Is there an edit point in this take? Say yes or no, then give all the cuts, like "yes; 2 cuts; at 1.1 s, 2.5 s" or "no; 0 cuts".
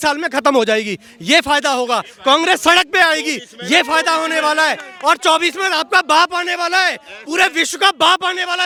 no; 0 cuts